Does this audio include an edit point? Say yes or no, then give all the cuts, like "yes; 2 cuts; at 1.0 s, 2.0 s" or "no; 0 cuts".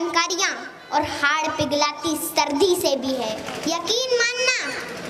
yes; 1 cut; at 3.5 s